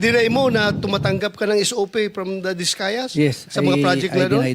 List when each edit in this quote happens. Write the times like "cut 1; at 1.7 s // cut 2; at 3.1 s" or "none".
none